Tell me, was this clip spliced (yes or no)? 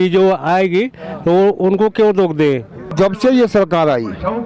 yes